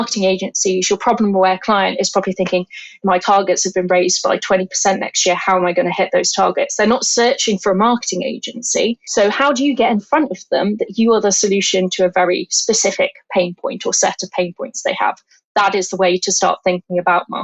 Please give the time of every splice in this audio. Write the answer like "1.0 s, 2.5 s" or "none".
3.1 s, 9.0 s